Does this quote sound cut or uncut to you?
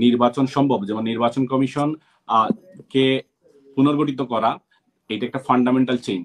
uncut